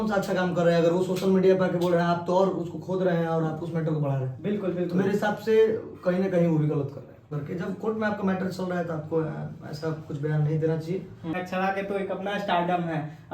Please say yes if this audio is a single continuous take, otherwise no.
no